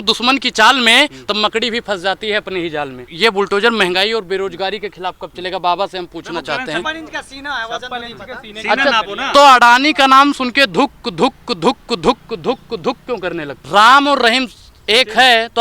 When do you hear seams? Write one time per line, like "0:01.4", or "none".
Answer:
0:03.0
0:06.9
0:13.6